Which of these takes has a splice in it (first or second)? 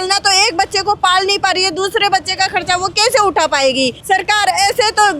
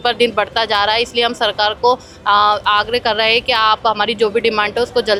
first